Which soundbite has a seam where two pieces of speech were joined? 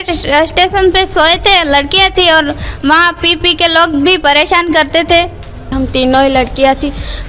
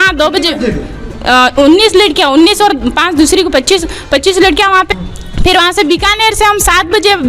second; 1 cut; at 4.9 s

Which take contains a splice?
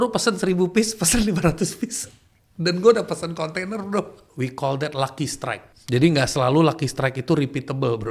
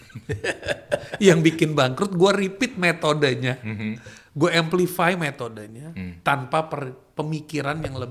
first; 2 cuts; at 4.2 s, 5.7 s

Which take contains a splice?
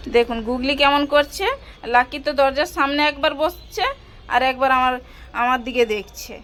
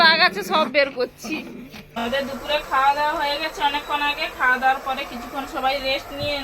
second; 1 cut; at 2.0 s

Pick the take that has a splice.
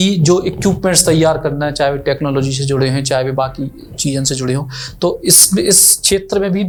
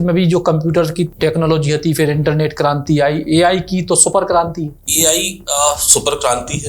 second; 2 cuts; at 1.1 s, 4.8 s

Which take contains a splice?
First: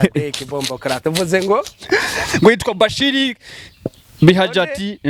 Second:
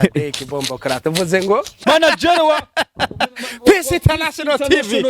second; 1 cut; at 1.8 s

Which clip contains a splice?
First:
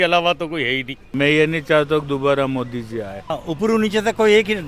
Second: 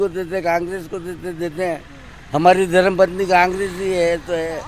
first; 2 cuts; at 1.0 s, 3.3 s

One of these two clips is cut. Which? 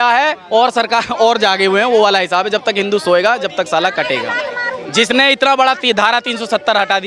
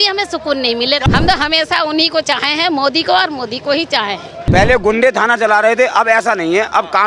second; 2 cuts; at 1.0 s, 4.4 s

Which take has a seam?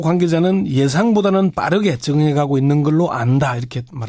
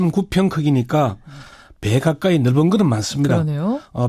first; 1 cut; at 1.4 s

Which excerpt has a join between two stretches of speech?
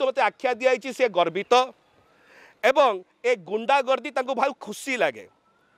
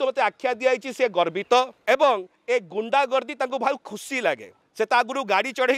second; 2 cuts; at 1.8 s, 4.6 s

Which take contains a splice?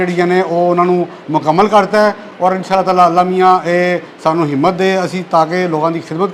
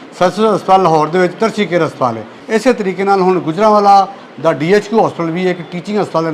second; 1 cut; at 2.3 s

